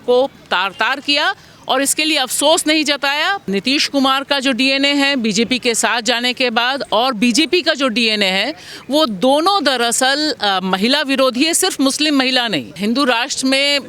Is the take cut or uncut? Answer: cut